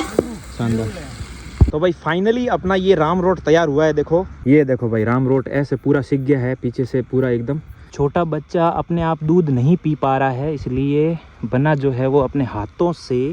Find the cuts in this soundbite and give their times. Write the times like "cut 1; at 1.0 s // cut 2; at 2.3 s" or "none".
cut 1; at 4.3 s // cut 2; at 8.0 s